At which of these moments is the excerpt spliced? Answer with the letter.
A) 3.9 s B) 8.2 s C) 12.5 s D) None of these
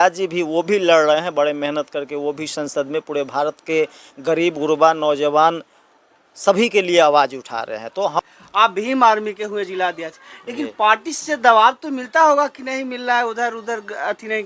B